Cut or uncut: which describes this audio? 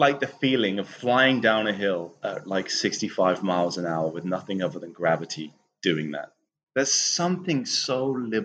uncut